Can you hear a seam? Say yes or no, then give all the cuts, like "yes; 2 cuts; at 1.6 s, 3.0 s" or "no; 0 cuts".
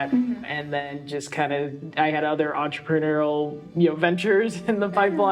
no; 0 cuts